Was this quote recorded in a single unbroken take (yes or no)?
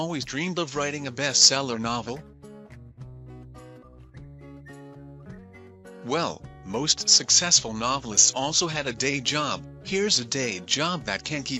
no